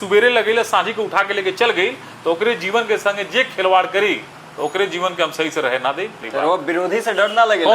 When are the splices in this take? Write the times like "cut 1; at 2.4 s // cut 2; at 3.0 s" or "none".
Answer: cut 1; at 6.2 s